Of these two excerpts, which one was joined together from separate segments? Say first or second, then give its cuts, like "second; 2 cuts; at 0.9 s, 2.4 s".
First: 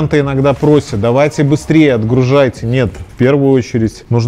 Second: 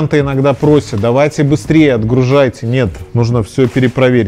second; 1 cut; at 3.0 s